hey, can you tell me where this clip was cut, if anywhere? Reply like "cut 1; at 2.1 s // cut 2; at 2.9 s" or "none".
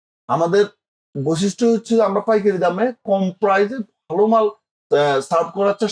none